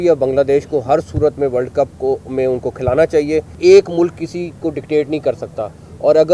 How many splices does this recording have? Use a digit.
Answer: 1